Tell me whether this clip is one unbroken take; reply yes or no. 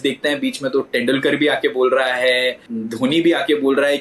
no